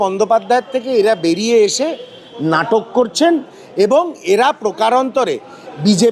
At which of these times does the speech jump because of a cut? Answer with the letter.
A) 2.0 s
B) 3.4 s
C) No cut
C